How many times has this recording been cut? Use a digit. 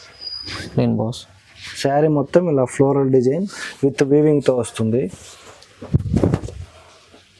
0